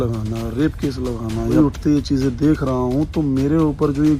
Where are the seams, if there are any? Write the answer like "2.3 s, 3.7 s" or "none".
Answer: 1.5 s